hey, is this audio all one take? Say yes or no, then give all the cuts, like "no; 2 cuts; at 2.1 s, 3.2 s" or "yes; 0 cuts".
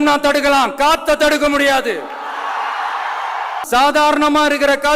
no; 1 cut; at 3.5 s